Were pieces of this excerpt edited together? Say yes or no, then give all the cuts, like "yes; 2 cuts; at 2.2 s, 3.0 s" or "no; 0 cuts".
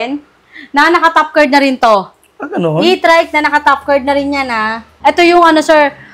yes; 1 cut; at 4.9 s